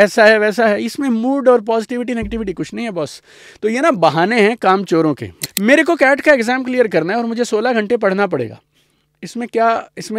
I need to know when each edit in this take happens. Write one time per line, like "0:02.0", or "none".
0:05.4